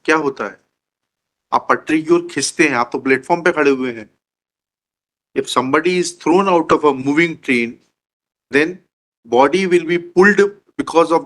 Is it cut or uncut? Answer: uncut